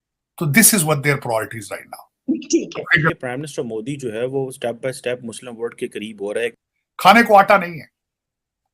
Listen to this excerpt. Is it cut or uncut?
cut